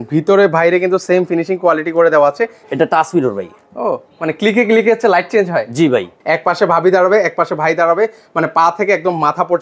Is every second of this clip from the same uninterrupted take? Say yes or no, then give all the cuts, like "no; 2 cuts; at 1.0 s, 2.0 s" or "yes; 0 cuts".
no; 2 cuts; at 2.6 s, 6.1 s